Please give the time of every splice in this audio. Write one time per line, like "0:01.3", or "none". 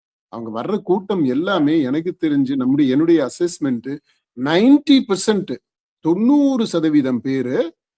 none